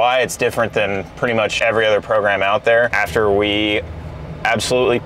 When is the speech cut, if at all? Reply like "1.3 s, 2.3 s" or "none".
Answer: 1.5 s, 2.9 s